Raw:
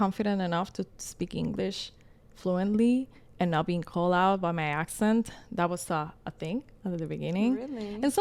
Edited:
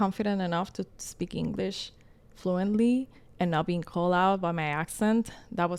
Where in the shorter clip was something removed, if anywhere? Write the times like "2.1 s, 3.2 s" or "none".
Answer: none